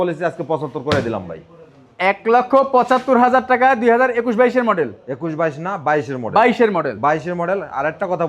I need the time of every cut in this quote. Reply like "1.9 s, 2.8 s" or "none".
none